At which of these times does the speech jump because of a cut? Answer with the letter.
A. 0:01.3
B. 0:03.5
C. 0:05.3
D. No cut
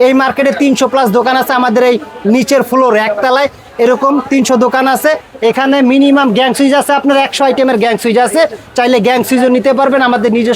C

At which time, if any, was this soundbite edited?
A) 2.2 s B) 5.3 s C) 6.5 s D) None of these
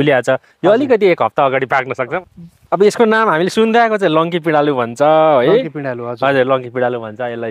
A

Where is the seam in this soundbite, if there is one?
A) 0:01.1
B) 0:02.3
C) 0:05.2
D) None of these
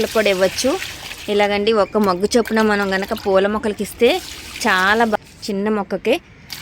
C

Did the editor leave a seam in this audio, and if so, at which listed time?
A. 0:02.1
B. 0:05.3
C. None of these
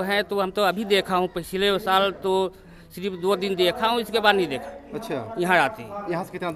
C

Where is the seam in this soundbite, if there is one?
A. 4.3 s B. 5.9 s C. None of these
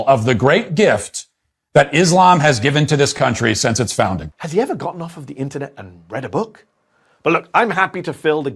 A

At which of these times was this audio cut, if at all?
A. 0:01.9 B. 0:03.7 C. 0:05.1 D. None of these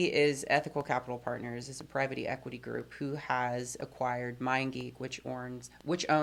D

